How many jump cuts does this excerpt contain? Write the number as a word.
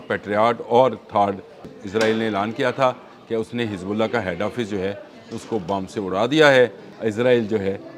two